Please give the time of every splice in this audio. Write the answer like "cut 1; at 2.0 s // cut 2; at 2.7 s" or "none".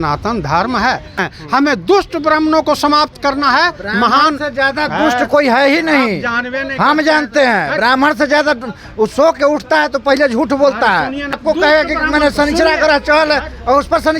cut 1; at 1.3 s // cut 2; at 11.3 s